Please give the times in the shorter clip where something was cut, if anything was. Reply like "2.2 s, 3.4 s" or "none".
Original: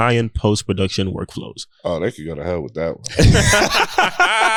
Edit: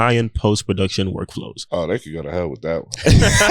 1.5 s